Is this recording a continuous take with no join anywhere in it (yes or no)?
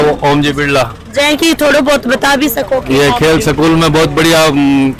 yes